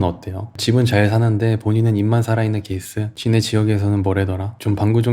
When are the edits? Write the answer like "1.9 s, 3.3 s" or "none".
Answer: 3.1 s